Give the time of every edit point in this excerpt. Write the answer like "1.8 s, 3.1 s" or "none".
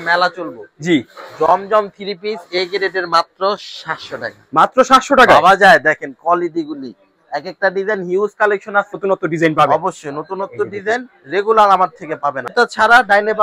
9.0 s, 12.4 s